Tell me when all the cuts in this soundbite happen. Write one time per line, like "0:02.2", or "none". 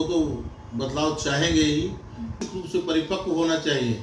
0:02.4